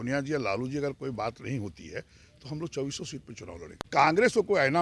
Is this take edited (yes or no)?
yes